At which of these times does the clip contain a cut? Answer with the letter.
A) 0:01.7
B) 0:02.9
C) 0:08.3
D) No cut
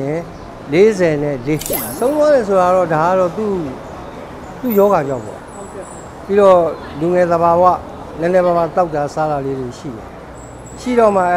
A